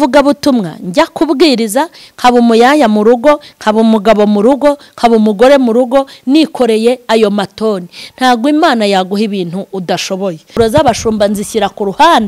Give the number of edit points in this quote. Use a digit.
1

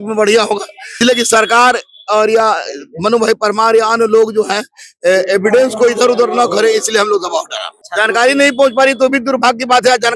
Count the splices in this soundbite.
2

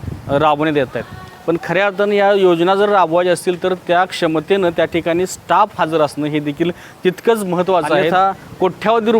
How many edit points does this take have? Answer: 1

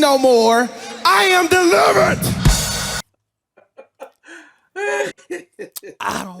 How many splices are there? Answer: 1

